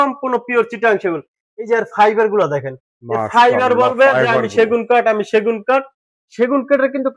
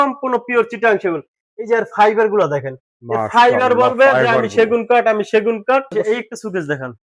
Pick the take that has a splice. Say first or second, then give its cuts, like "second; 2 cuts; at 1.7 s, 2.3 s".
second; 1 cut; at 5.9 s